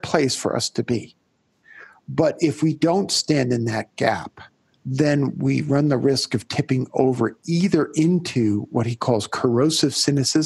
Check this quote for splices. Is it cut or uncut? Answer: uncut